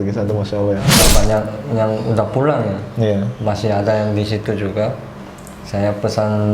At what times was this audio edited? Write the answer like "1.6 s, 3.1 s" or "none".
1.0 s